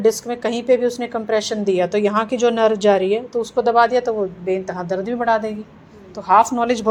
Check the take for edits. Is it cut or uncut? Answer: uncut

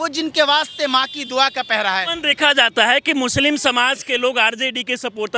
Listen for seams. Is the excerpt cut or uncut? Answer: cut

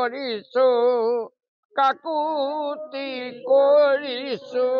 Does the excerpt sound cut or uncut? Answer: uncut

